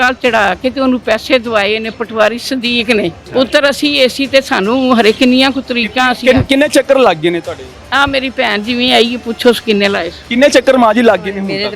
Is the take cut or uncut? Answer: cut